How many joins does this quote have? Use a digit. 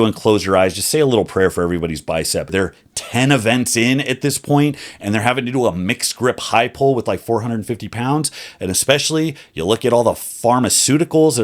1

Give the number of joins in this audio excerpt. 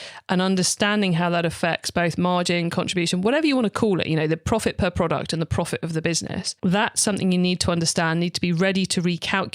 2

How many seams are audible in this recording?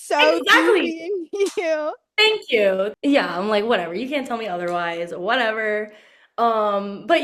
1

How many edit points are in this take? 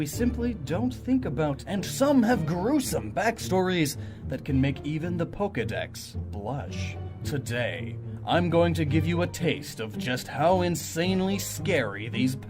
0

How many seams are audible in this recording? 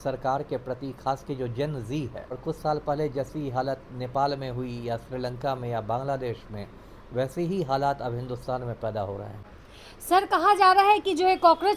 2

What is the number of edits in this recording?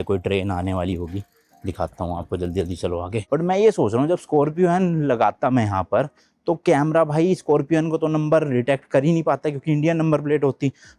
1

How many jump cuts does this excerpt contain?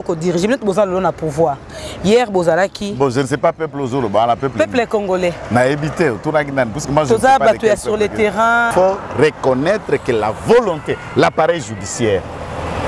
1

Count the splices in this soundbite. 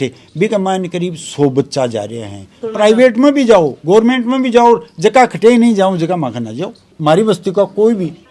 2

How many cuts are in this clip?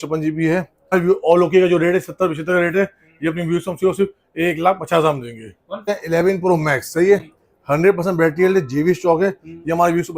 2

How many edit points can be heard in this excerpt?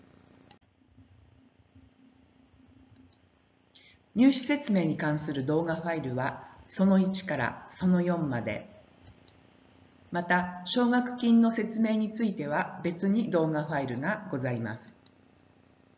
1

